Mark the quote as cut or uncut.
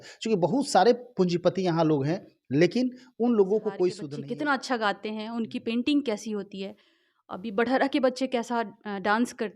cut